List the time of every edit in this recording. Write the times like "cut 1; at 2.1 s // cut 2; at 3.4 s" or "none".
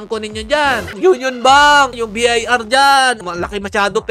cut 1; at 0.9 s // cut 2; at 1.9 s // cut 3; at 3.2 s